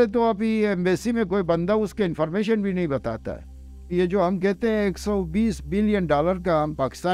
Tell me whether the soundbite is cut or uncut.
cut